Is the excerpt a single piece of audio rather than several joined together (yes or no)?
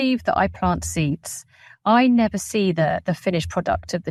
yes